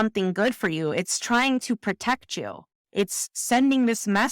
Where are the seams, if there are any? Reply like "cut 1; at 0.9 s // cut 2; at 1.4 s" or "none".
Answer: cut 1; at 2.7 s